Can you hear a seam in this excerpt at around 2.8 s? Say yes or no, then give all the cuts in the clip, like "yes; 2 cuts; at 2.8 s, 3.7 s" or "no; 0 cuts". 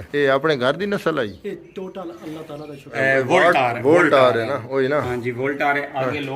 yes; 1 cut; at 2.8 s